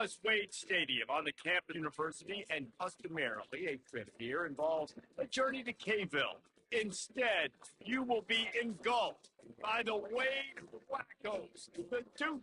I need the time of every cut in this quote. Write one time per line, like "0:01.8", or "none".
0:01.7